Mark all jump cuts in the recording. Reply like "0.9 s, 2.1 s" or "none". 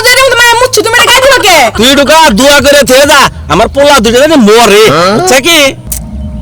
1.7 s